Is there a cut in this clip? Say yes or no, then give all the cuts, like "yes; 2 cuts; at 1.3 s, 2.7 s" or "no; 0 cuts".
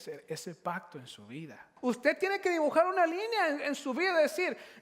yes; 1 cut; at 1.7 s